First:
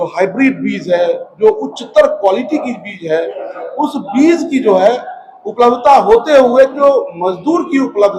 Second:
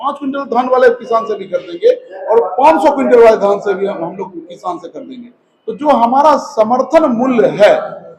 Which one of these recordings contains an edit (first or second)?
first